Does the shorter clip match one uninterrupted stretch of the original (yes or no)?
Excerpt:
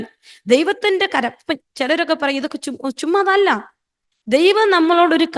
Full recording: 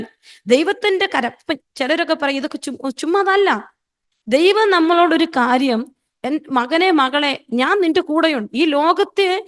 yes